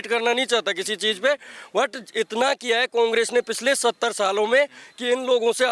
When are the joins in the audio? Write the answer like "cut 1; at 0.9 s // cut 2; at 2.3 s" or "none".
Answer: none